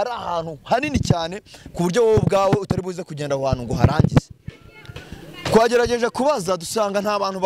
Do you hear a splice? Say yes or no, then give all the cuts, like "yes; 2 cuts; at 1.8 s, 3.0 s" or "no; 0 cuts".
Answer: no; 0 cuts